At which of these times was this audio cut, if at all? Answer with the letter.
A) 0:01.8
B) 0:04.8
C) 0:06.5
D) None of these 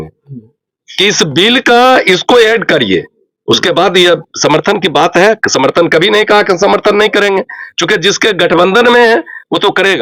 D